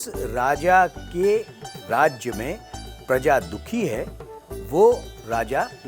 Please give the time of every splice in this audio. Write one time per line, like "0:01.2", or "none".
none